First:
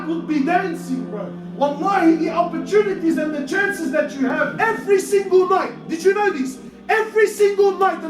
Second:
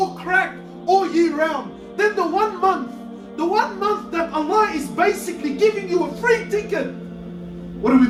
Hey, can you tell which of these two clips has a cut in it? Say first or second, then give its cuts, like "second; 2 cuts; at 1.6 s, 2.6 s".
first; 1 cut; at 4.5 s